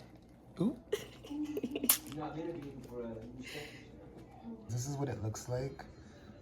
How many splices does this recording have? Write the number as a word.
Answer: one